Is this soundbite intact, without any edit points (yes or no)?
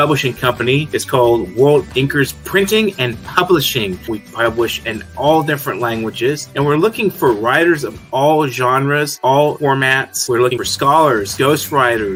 yes